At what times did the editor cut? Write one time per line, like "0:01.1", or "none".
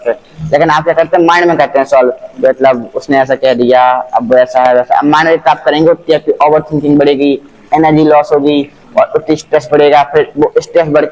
none